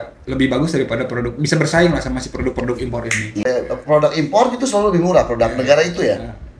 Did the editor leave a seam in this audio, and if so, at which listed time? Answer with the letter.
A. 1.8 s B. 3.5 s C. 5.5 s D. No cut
B